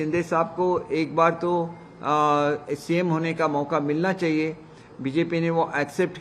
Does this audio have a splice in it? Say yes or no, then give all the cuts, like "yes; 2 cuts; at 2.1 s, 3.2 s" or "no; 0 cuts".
no; 0 cuts